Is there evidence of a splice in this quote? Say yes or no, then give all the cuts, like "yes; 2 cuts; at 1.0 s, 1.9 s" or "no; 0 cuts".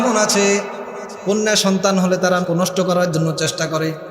yes; 1 cut; at 2.4 s